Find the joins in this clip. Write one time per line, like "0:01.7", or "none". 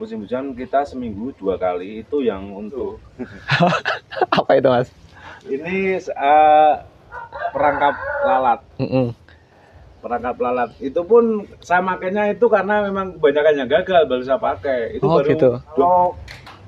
0:02.8
0:15.8